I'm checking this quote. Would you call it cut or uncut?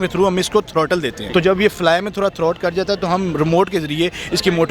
cut